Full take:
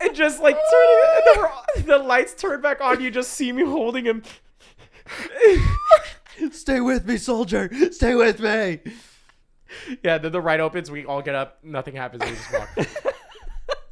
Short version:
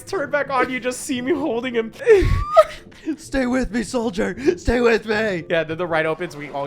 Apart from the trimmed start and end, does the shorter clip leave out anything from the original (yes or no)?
yes